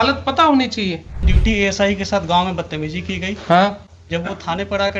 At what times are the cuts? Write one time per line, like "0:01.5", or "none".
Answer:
0:01.3